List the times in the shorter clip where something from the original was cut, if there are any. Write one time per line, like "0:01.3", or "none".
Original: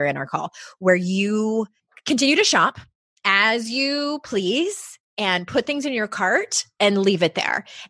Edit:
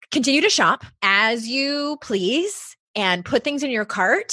0:00.9